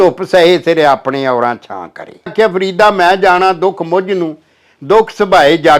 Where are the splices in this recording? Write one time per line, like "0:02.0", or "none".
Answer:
0:02.3

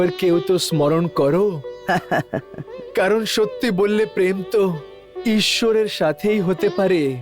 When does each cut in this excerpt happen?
none

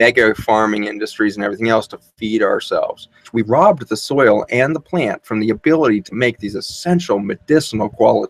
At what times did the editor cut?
0:03.3

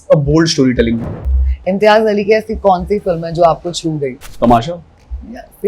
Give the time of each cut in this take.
0:01.1
0:04.2

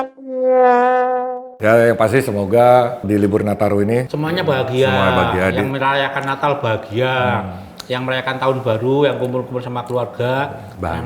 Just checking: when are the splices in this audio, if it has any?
0:01.4
0:03.0
0:04.1

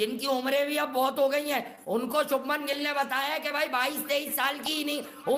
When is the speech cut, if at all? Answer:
none

